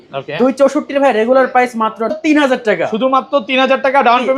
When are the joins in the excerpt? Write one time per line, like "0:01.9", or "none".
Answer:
0:02.1